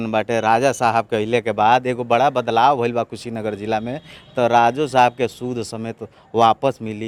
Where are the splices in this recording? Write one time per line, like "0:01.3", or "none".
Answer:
none